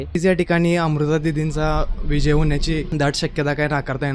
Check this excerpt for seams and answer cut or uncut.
cut